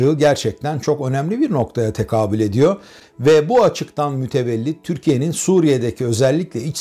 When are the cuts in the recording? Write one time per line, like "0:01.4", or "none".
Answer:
none